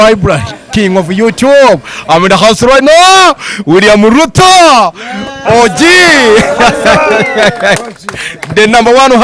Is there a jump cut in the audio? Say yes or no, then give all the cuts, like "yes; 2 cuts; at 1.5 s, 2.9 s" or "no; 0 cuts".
no; 0 cuts